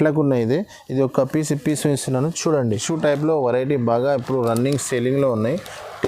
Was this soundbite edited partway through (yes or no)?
yes